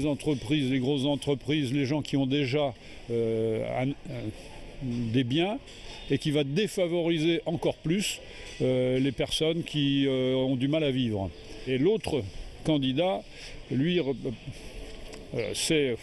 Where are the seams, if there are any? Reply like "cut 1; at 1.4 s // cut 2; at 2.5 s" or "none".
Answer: none